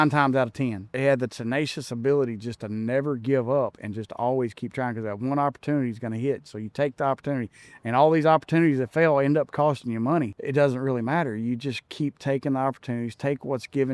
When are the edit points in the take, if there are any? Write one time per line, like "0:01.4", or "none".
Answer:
0:01.0
0:10.4